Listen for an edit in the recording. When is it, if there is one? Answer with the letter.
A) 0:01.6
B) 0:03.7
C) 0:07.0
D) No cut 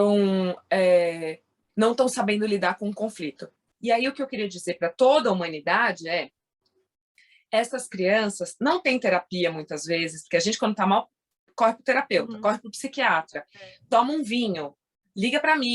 B